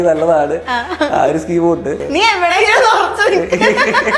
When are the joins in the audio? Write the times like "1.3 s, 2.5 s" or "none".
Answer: 2.0 s